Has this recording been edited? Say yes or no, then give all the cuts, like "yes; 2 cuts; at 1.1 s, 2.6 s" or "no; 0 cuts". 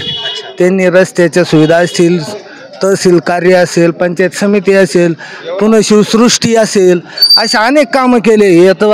no; 0 cuts